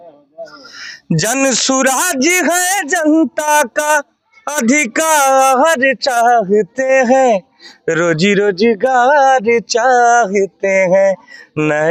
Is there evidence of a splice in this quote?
no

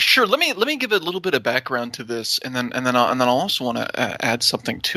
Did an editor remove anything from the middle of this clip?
no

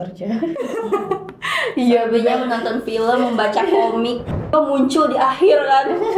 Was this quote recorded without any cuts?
no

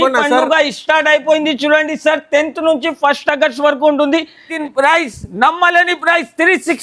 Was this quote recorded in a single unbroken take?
no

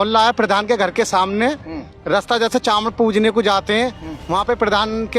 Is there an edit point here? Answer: no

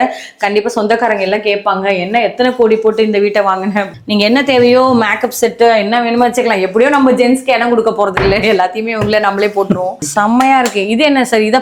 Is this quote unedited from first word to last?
no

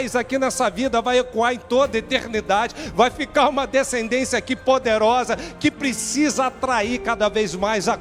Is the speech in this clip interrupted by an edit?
no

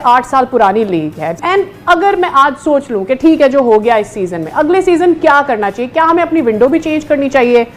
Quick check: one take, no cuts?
no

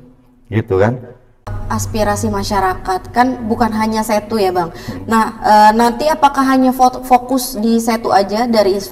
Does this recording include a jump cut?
yes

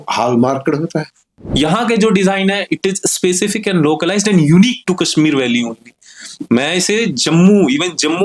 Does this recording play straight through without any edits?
no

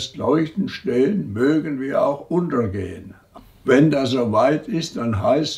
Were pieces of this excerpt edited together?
yes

